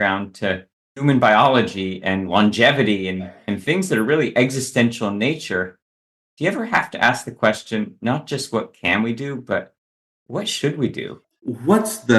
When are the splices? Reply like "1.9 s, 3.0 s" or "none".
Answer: 11.2 s